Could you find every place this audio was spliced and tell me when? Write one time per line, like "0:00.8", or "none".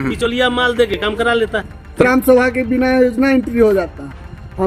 0:02.0